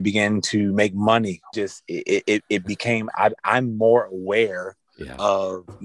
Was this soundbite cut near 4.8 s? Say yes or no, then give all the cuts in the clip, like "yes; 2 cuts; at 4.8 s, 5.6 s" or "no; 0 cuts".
no; 1 cut; at 1.4 s